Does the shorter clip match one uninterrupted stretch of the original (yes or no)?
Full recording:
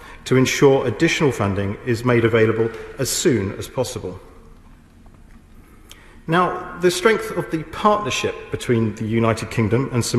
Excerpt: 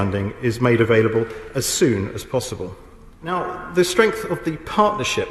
no